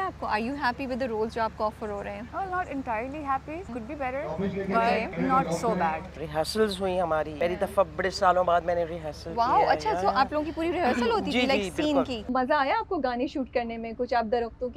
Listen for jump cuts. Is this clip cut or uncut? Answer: cut